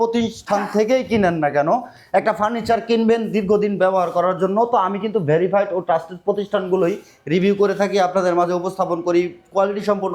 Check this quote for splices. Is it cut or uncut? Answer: uncut